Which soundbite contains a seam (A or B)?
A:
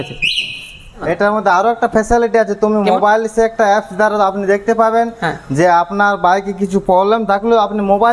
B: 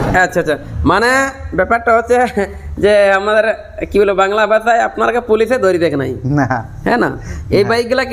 A